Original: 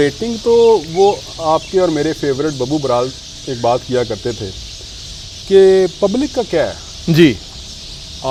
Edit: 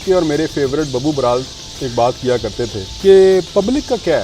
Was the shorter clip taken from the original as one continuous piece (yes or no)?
no